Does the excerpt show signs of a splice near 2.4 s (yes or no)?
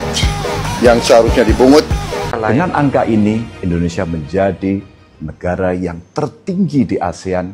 yes